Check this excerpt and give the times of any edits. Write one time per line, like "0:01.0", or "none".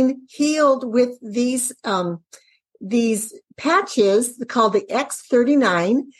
none